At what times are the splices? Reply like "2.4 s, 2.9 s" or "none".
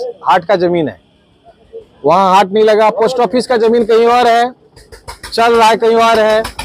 none